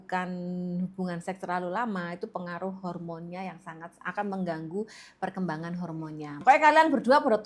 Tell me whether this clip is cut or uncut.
cut